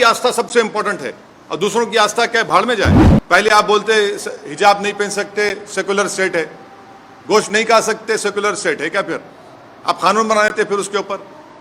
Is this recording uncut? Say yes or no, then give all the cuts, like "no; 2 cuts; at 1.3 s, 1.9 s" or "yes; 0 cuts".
no; 1 cut; at 3.1 s